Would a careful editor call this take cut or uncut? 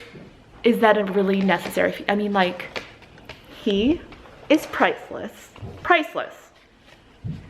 uncut